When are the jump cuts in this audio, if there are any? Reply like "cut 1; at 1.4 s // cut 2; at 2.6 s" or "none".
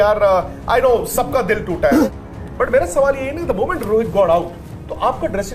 cut 1; at 2.1 s